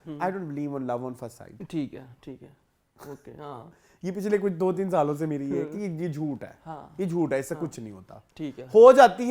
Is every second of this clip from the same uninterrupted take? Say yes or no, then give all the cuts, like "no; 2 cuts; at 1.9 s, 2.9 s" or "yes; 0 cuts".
yes; 0 cuts